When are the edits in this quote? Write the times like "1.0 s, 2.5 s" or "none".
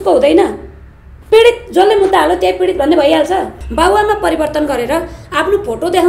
3.6 s